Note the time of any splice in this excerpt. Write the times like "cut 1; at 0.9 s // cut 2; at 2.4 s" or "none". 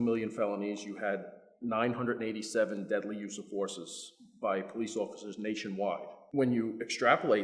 cut 1; at 6.2 s